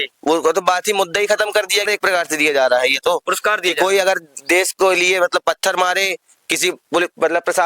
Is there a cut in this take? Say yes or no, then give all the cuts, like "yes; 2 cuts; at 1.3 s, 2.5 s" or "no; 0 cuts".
yes; 1 cut; at 1.9 s